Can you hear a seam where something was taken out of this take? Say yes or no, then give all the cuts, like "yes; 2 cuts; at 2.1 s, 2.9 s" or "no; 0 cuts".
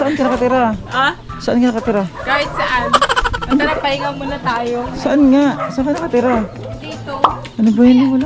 no; 0 cuts